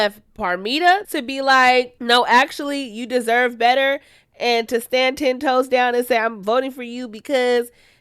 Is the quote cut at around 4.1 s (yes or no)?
no